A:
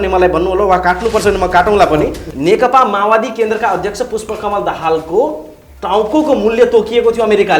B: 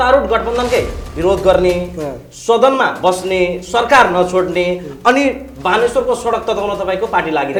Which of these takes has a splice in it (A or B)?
A